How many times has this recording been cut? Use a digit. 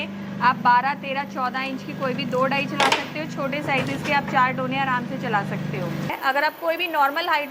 1